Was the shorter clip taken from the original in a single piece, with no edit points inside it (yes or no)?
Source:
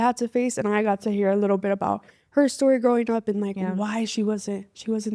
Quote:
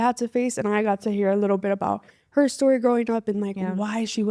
yes